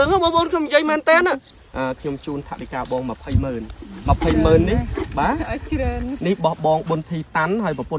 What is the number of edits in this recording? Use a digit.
2